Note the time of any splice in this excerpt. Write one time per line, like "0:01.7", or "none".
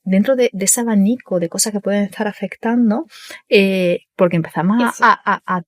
0:04.1